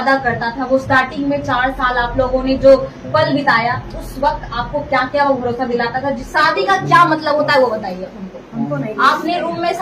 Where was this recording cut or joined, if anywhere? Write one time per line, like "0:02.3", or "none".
0:06.2

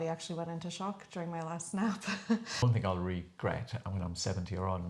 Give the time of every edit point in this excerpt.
0:02.6

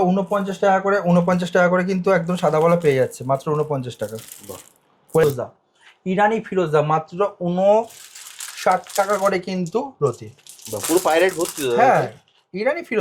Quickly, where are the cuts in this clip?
0:05.2

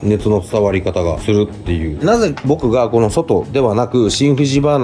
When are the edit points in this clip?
0:01.9

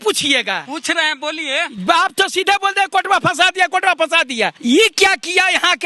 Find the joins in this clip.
0:04.5

